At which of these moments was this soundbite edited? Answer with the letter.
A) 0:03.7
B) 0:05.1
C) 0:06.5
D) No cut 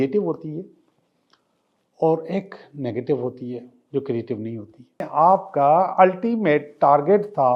B